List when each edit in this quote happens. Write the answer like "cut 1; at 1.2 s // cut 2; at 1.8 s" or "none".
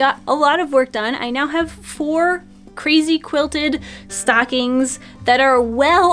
none

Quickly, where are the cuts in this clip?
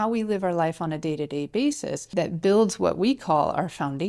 cut 1; at 2.0 s

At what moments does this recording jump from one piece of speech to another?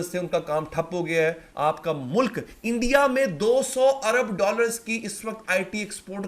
cut 1; at 1.5 s

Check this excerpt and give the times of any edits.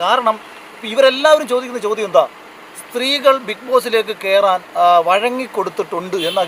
none

